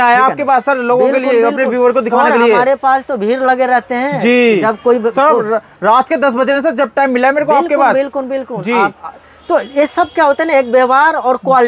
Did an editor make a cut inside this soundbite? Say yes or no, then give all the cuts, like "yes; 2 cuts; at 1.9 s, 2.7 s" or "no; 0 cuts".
no; 0 cuts